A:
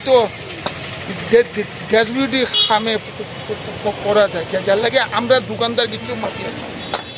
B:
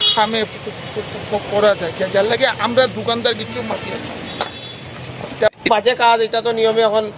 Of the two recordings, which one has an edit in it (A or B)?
B